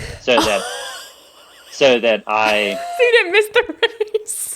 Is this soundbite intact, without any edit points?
no; 1 cut; at 2.8 s

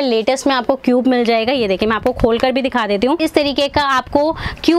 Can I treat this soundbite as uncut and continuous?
no; 1 cut; at 3.2 s

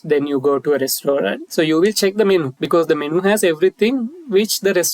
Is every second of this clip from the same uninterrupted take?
no; 2 cuts; at 1.4 s, 2.6 s

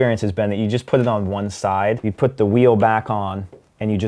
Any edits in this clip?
yes; 1 cut; at 2.1 s

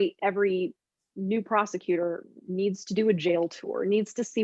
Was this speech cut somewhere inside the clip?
no; 0 cuts

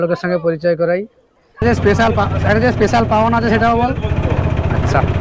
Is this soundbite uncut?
no; 1 cut; at 1.6 s

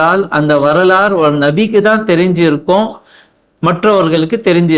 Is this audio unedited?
yes; 0 cuts

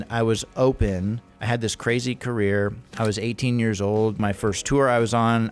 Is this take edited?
yes; 3 cuts; at 1.3 s, 2.9 s, 4.2 s

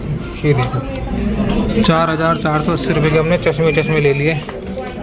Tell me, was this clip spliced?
no; 0 cuts

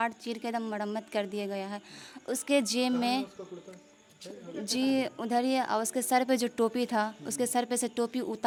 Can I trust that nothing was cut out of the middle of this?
yes; 0 cuts

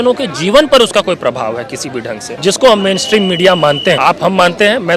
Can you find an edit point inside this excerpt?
yes; 2 cuts; at 2.3 s, 4.0 s

